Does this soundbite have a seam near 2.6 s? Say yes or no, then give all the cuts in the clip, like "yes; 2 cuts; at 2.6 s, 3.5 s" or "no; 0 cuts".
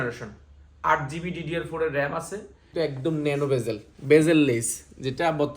yes; 1 cut; at 2.6 s